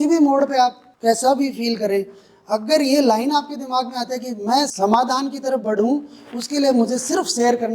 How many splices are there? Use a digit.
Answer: 2